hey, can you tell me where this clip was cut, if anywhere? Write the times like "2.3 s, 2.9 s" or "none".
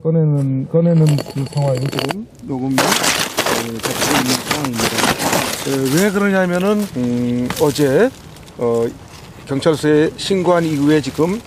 none

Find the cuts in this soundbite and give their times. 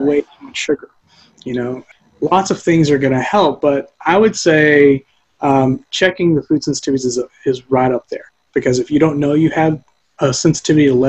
1.8 s

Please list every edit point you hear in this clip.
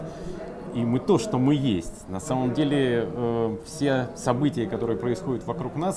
none

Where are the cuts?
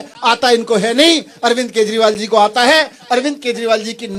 none

